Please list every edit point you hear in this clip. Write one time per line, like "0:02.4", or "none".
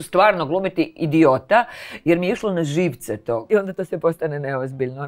0:03.5

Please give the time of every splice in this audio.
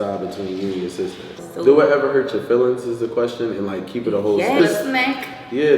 0:01.4
0:04.6

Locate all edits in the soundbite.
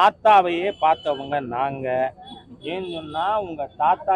none

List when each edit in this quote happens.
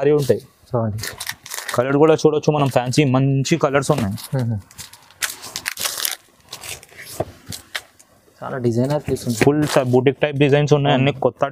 none

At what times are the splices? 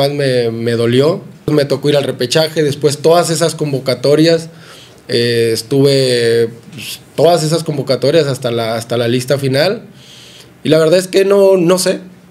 0:01.5

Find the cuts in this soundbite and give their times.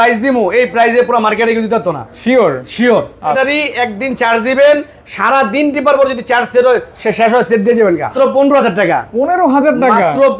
0:03.4
0:08.1

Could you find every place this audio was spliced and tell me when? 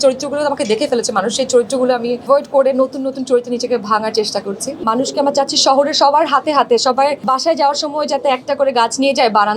0:02.2
0:04.8
0:07.2

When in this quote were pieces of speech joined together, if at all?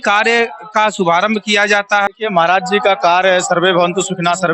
0:02.1

